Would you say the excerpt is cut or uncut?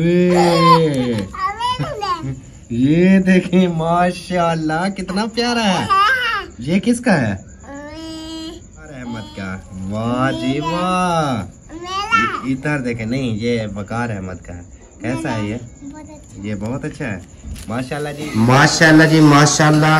cut